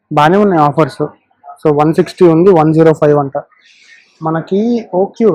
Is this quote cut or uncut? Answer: uncut